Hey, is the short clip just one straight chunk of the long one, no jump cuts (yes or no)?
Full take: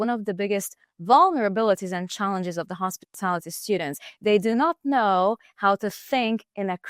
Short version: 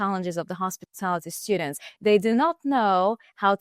yes